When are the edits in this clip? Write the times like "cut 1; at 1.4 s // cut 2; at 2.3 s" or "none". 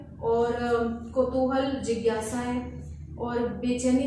none